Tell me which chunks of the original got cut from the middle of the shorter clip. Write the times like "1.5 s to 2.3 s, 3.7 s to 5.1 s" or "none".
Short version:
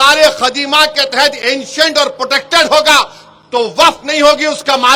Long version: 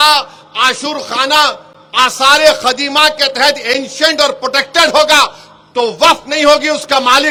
none